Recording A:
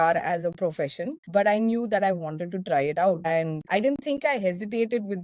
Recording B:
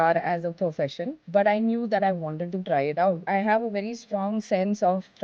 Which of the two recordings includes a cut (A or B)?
B